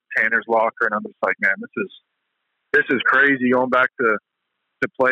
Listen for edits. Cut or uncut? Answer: uncut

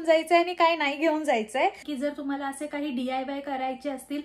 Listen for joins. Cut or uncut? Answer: cut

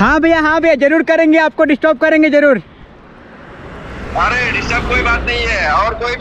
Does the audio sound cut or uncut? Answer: uncut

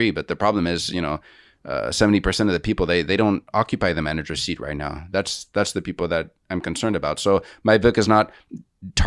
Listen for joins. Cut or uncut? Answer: uncut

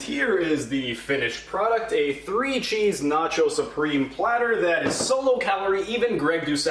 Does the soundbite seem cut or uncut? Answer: uncut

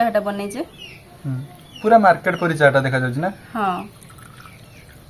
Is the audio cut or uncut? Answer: uncut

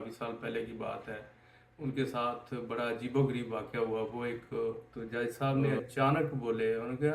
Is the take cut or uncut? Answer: cut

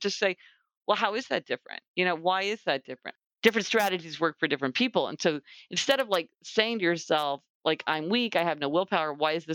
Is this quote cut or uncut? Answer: cut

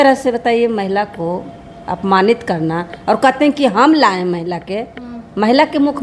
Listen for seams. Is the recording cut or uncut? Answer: uncut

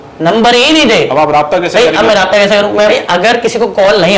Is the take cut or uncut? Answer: cut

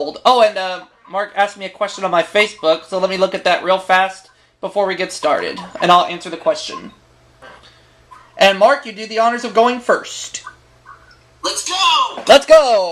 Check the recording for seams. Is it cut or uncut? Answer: uncut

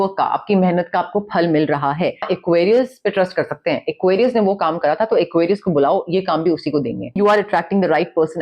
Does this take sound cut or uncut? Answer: cut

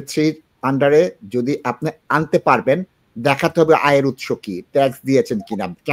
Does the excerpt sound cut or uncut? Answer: uncut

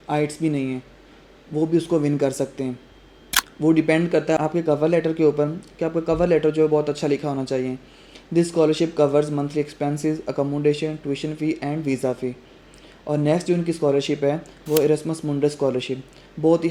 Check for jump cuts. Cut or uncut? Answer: uncut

